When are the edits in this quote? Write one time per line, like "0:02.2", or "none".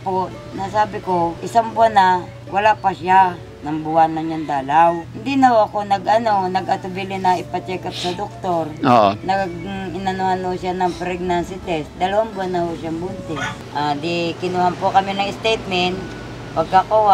0:01.4
0:05.1
0:09.2
0:13.5